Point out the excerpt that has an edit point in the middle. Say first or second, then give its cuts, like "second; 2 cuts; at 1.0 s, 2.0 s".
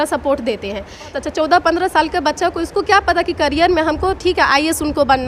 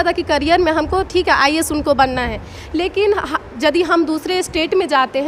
first; 1 cut; at 1.1 s